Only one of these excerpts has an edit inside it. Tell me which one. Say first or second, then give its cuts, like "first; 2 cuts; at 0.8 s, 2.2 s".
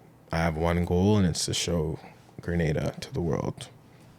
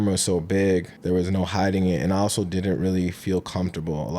second; 1 cut; at 0.9 s